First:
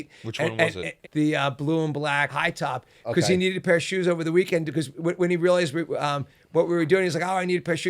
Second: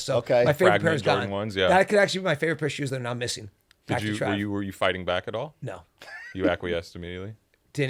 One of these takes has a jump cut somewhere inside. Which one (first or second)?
first